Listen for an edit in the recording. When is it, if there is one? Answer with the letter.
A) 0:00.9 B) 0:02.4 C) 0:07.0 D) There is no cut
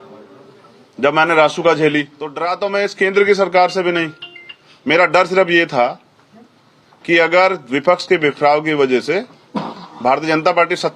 B